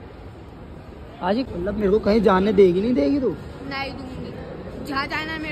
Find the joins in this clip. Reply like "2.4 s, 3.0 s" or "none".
1.5 s